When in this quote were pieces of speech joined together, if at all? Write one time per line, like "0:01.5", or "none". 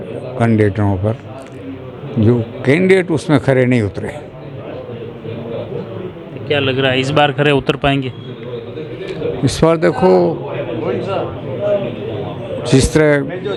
none